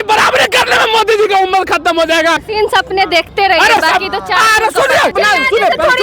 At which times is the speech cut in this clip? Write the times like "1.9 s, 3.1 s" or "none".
2.4 s, 5.1 s